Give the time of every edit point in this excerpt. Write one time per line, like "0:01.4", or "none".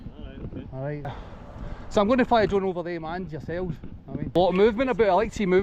0:01.1
0:04.4